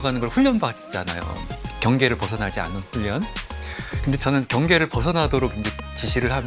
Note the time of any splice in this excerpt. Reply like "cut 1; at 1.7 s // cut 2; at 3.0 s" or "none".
none